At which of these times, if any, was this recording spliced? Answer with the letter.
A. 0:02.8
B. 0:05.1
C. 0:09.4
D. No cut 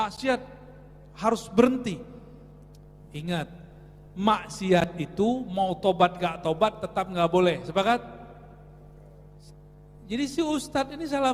C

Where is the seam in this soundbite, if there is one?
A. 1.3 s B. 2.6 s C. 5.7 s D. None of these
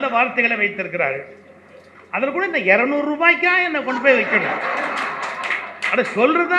D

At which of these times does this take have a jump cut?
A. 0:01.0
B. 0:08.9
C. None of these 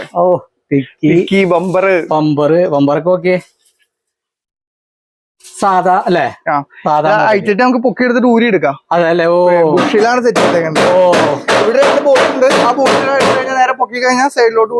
C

